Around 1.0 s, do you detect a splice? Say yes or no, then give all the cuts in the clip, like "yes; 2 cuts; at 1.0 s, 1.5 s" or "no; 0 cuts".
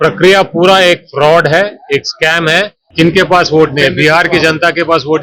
no; 1 cut; at 2.8 s